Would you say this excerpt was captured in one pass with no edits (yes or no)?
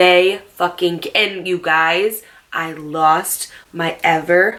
yes